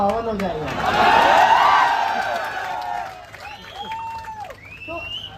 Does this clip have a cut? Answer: no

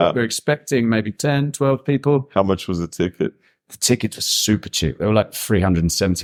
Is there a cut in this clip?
no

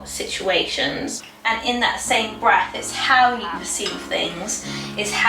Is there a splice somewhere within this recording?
yes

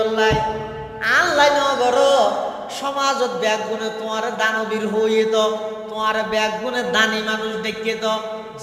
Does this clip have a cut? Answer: no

